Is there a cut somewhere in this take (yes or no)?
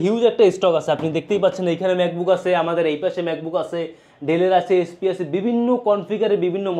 no